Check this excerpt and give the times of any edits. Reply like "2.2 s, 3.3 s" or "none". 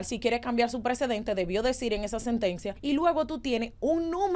2.7 s